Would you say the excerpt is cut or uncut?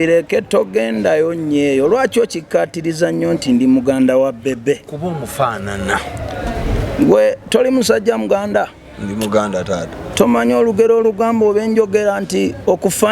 uncut